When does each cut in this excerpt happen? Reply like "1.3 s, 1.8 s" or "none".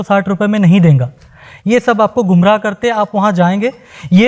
none